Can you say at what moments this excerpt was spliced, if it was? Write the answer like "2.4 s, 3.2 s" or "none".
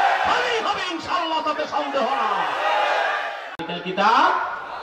3.6 s